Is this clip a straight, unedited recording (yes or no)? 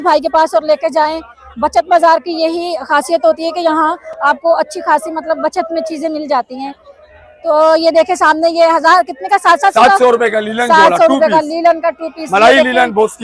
yes